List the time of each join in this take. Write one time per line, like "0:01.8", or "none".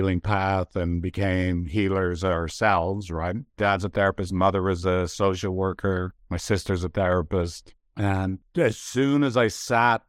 0:08.4